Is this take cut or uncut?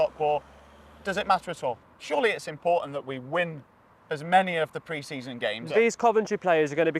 cut